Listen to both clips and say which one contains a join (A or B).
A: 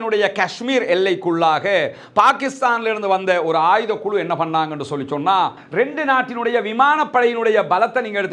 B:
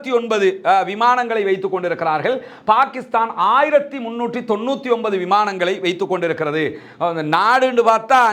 A